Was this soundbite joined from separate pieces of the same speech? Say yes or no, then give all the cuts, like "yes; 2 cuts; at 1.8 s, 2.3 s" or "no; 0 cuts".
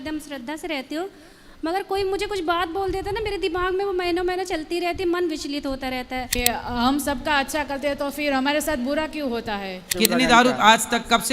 yes; 2 cuts; at 6.4 s, 9.9 s